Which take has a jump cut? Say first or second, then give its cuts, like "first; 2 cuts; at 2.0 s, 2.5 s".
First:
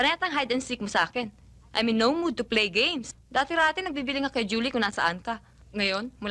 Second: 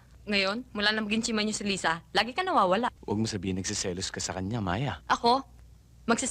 second; 1 cut; at 3.0 s